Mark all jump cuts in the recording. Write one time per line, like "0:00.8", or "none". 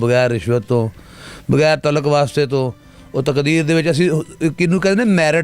none